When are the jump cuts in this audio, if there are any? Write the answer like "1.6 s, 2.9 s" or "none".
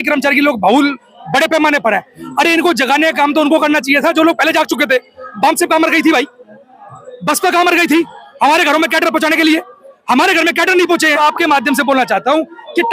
11.2 s

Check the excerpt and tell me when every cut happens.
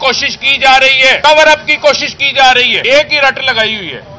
1.2 s, 2.8 s

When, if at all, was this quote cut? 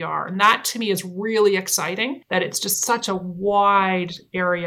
2.2 s

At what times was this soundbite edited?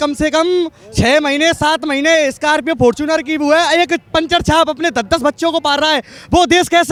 none

